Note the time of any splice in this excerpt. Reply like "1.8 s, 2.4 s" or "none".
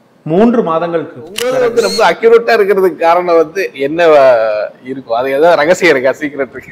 1.4 s